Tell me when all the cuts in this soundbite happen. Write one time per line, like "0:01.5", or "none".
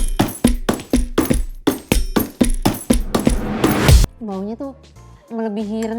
0:04.0